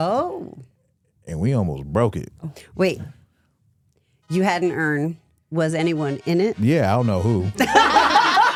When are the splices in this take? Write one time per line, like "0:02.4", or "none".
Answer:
none